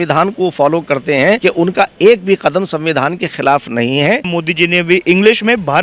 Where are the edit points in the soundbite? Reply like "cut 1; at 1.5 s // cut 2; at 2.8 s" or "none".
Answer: cut 1; at 1.4 s // cut 2; at 4.3 s